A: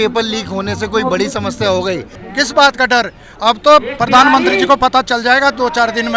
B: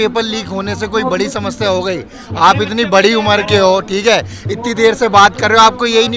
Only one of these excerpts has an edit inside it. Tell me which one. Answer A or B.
A